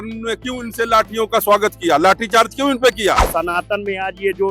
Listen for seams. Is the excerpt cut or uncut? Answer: cut